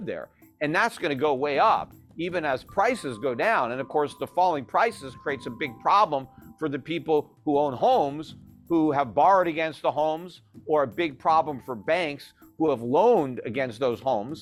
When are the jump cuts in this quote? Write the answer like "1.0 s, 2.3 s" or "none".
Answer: none